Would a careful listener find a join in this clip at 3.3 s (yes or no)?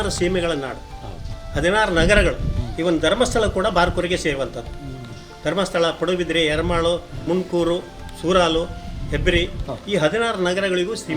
no